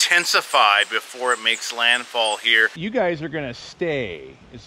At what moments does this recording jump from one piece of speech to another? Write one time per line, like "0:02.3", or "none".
none

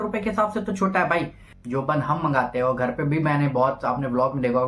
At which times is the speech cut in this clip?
0:01.1

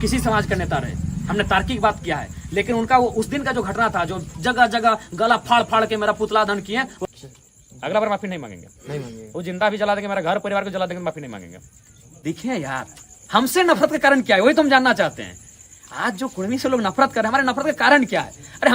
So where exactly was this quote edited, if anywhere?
0:07.1
0:12.2

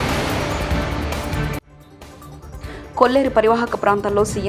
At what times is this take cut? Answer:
0:01.6

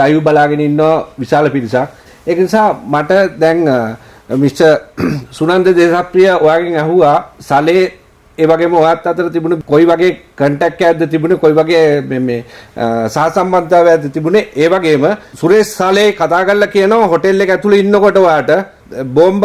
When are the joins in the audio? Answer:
none

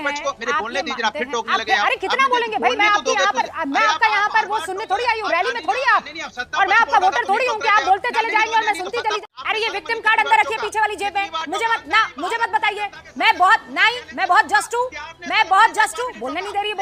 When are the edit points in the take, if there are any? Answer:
0:09.2
0:11.3

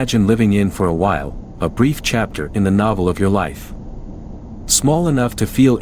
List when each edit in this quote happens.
none

